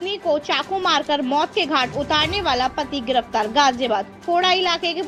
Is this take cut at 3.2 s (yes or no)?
no